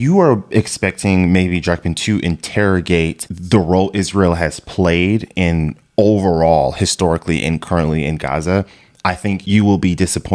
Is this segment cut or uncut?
uncut